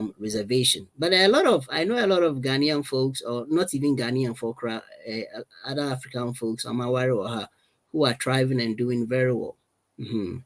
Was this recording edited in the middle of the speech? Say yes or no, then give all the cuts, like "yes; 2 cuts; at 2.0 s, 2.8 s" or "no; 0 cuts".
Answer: no; 0 cuts